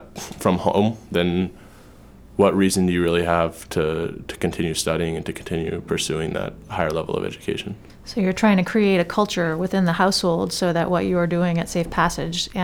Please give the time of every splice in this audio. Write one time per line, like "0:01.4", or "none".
none

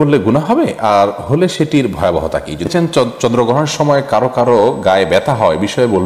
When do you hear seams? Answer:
0:02.7

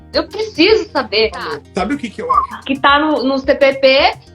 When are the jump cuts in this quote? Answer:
0:01.9

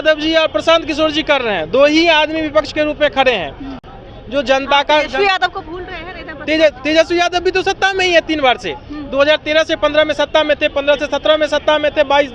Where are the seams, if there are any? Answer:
none

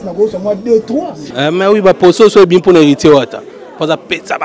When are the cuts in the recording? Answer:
0:01.3

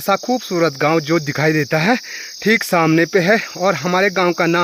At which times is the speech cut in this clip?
none

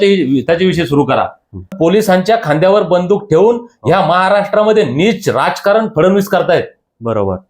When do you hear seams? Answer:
0:01.7

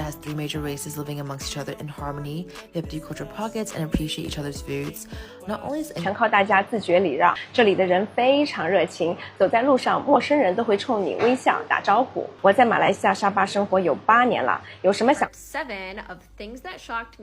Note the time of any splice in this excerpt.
0:06.0
0:15.3

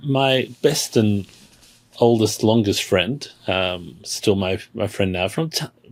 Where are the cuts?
none

